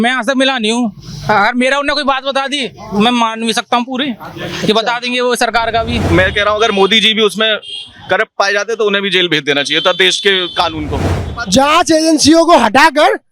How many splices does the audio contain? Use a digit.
2